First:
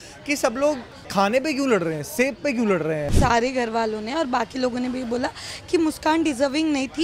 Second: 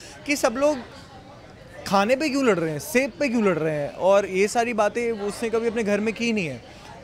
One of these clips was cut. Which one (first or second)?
first